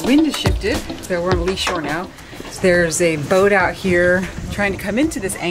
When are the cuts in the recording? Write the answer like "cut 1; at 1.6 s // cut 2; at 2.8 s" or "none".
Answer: cut 1; at 0.9 s // cut 2; at 2.5 s